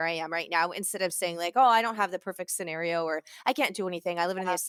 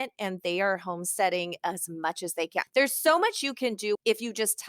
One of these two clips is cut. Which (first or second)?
second